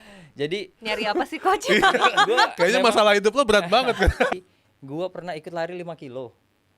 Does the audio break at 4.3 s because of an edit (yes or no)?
yes